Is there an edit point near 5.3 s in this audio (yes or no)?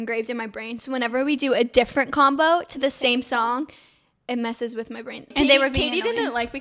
yes